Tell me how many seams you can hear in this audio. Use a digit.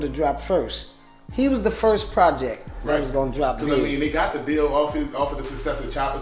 0